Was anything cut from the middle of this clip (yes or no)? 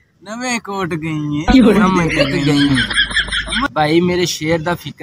yes